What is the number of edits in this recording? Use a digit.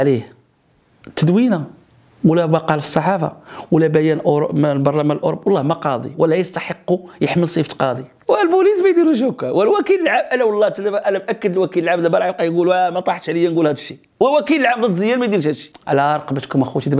2